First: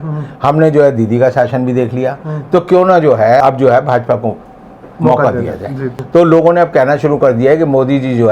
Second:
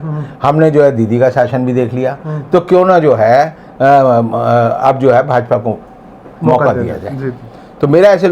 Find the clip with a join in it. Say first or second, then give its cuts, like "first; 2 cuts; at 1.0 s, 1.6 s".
first; 2 cuts; at 3.4 s, 6.0 s